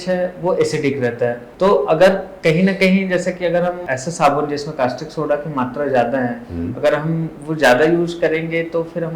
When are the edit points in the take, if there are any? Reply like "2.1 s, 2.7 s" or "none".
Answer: 1.5 s, 3.8 s